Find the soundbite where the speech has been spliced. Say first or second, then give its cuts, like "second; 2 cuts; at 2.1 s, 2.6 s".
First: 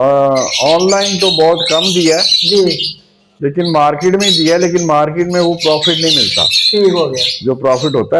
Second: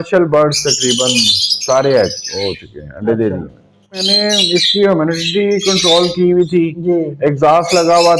second; 1 cut; at 4.1 s